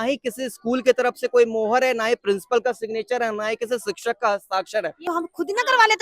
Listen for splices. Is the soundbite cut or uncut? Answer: cut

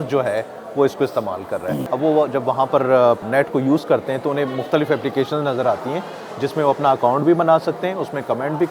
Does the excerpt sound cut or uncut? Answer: cut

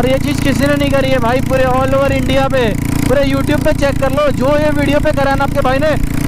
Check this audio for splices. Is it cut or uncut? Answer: uncut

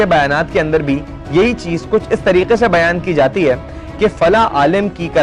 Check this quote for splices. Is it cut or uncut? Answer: uncut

